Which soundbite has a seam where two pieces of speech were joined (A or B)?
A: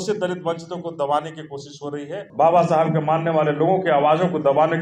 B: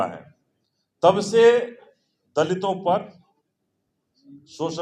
A